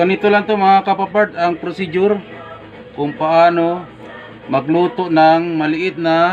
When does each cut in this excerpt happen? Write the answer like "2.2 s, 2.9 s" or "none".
none